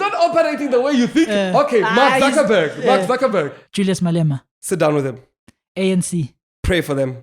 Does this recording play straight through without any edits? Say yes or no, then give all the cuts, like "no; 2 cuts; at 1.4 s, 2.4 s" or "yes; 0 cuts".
no; 2 cuts; at 3.6 s, 4.5 s